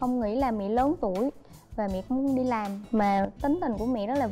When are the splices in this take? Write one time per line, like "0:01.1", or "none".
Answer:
none